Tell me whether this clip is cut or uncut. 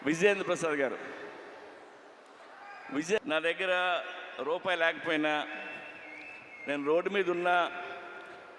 cut